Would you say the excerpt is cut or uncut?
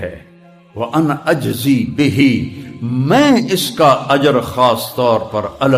uncut